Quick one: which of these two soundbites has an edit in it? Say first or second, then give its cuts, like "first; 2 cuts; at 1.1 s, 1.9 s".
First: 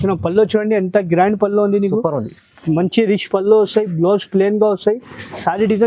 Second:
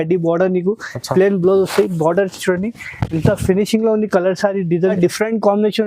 second; 1 cut; at 5.0 s